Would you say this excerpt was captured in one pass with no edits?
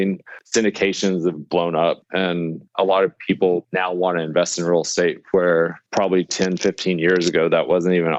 no; 3 cuts; at 2.2 s, 3.7 s, 5.8 s

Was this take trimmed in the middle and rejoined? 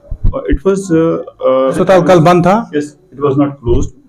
yes; 1 cut; at 1.7 s

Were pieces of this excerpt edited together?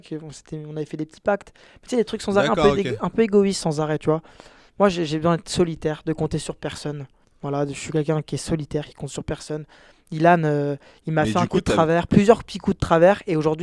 no; 0 cuts

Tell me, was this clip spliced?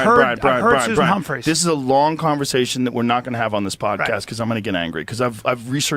no; 0 cuts

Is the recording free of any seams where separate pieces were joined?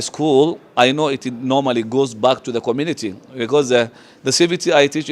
yes; 0 cuts

